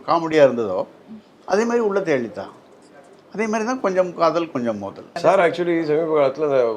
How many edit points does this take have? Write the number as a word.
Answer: one